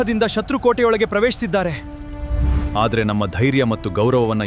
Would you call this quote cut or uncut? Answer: uncut